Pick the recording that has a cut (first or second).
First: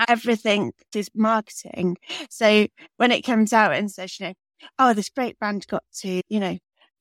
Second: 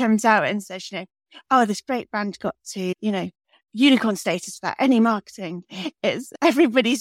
first